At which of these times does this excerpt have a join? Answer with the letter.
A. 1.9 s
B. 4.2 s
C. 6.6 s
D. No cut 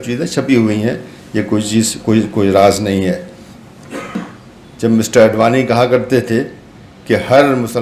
B